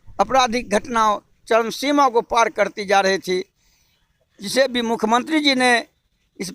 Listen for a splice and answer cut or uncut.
uncut